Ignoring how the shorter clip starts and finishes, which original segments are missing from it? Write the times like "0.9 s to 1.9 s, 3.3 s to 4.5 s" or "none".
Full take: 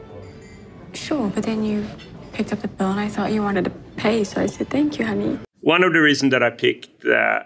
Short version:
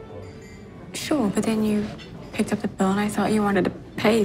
none